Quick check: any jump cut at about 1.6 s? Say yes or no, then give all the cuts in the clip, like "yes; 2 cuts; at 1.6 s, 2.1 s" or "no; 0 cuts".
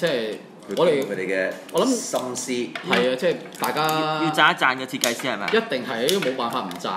no; 0 cuts